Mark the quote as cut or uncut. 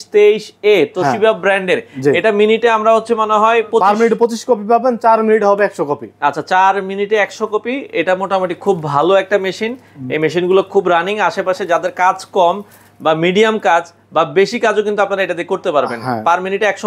uncut